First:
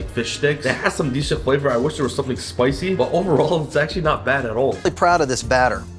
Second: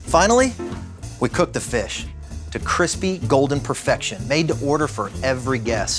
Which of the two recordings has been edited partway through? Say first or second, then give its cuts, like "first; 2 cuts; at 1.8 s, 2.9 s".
first; 1 cut; at 4.8 s